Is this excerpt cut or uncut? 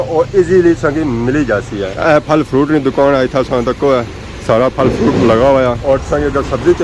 uncut